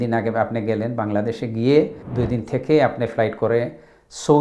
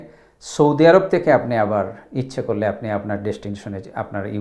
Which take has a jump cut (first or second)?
first